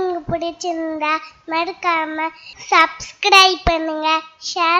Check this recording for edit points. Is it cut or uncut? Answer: uncut